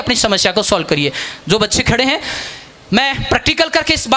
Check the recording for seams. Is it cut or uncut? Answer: uncut